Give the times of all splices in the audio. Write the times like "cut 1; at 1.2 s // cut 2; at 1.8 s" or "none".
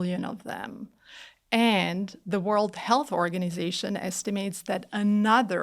none